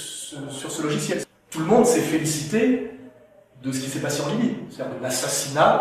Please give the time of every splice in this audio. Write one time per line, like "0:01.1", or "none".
0:01.2

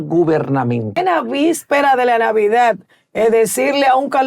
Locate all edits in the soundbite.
0:01.0

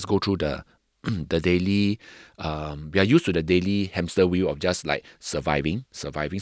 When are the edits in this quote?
none

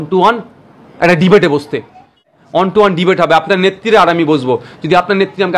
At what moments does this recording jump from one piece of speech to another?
0:02.3

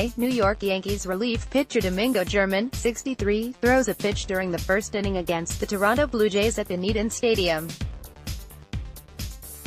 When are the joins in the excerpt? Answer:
0:07.7

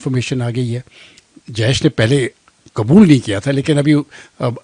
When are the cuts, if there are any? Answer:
none

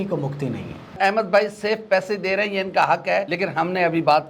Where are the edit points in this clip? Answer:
0:01.0
0:03.3

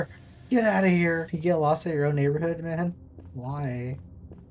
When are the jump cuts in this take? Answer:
0:01.3

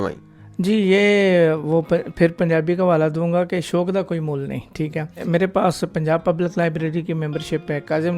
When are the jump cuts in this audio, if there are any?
0:05.2

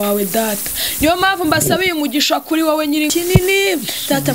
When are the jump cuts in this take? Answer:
0:03.1

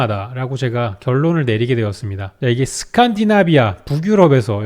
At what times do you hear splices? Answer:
0:02.4

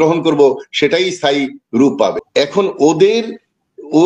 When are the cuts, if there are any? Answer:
0:02.2

